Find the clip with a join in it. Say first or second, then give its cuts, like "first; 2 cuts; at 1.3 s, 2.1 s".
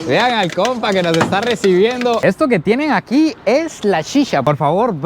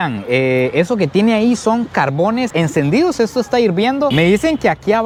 first; 1 cut; at 2.2 s